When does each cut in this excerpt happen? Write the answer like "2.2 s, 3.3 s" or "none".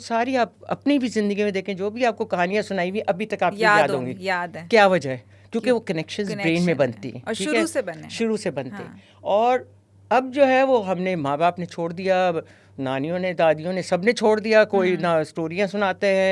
none